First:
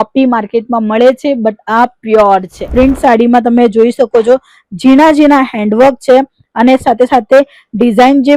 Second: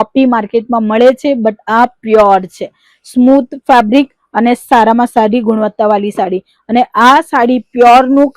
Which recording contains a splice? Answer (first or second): first